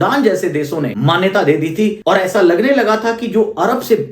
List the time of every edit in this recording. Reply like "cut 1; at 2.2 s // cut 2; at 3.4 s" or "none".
cut 1; at 0.9 s // cut 2; at 2.0 s